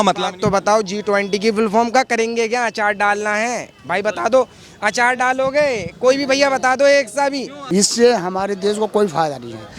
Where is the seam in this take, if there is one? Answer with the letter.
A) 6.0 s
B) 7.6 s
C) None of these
B